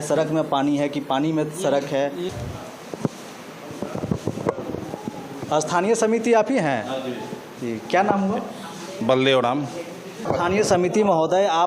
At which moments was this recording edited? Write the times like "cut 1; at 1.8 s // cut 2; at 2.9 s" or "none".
cut 1; at 2.3 s // cut 2; at 10.2 s